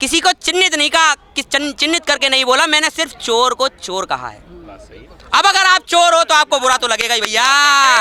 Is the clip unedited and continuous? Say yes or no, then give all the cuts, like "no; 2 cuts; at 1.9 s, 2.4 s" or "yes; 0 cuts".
yes; 0 cuts